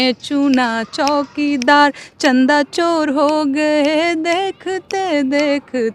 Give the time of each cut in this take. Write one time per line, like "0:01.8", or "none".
none